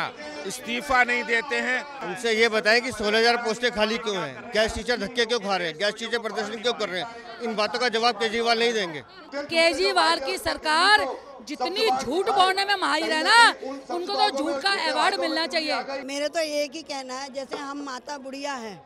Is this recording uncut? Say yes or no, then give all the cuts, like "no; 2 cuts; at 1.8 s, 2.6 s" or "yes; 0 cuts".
no; 3 cuts; at 1.9 s, 9.3 s, 16.1 s